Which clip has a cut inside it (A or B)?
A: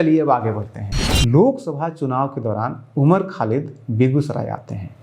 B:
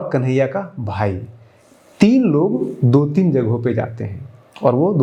A